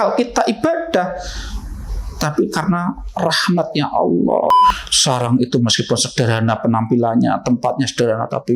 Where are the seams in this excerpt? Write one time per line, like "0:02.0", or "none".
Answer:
0:04.6